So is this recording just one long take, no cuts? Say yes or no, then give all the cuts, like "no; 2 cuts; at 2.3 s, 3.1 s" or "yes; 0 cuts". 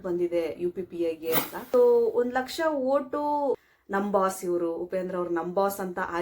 no; 2 cuts; at 1.6 s, 3.6 s